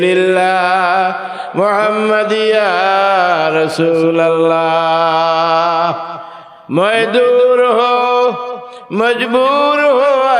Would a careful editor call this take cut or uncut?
uncut